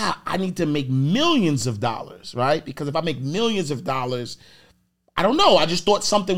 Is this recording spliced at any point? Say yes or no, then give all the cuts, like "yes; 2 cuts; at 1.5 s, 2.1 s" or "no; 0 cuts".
no; 0 cuts